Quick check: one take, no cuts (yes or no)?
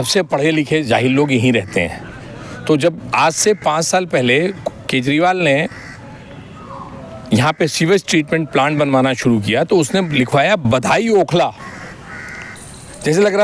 yes